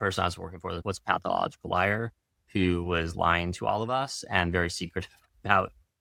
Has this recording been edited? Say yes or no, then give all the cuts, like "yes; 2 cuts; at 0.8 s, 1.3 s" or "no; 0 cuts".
no; 0 cuts